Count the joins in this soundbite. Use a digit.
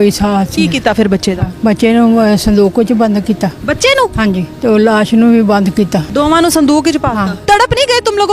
4